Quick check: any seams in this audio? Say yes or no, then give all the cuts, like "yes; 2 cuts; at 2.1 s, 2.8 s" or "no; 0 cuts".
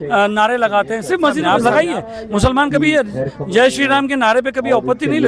yes; 1 cut; at 1.4 s